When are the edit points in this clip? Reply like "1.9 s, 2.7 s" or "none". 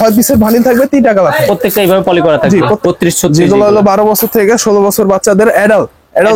2.8 s